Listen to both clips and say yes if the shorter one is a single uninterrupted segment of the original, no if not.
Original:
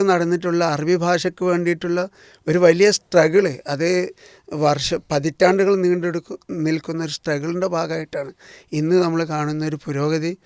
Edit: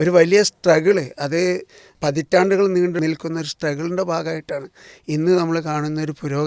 no